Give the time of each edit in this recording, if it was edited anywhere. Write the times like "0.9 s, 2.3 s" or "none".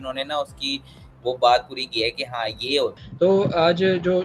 2.9 s